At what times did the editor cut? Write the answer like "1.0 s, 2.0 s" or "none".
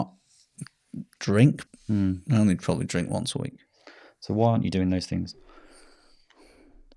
1.7 s